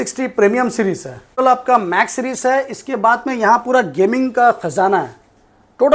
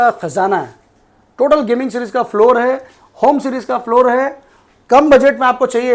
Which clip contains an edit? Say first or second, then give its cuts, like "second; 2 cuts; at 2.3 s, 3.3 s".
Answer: first; 1 cut; at 1.4 s